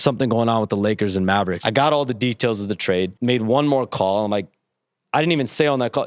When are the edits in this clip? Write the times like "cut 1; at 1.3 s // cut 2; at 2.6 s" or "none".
cut 1; at 1.6 s // cut 2; at 3.1 s